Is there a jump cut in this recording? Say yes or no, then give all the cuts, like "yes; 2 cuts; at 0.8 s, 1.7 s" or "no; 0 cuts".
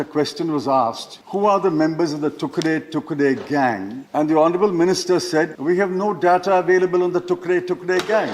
yes; 3 cuts; at 1.1 s, 4.0 s, 5.6 s